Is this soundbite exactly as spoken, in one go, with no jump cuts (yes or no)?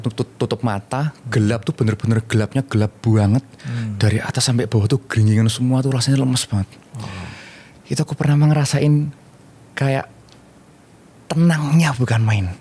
yes